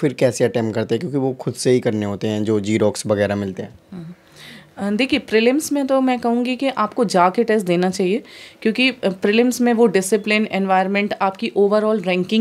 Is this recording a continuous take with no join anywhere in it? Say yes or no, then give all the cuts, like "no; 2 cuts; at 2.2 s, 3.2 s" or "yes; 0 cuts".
yes; 0 cuts